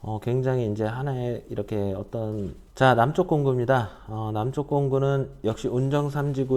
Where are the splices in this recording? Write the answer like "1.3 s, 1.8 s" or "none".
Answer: 2.6 s